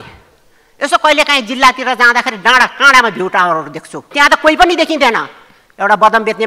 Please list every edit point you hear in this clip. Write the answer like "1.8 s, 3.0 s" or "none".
4.0 s